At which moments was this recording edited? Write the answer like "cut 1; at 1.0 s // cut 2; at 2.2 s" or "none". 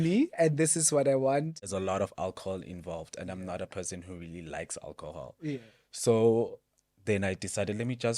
cut 1; at 1.7 s